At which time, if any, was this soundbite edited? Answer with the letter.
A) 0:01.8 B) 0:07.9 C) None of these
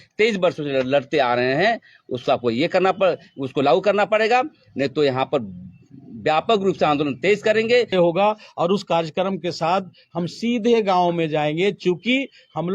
B